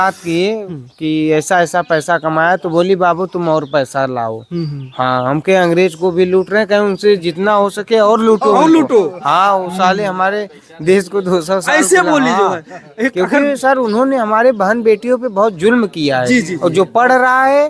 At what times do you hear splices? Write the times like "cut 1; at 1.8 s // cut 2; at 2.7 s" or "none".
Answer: none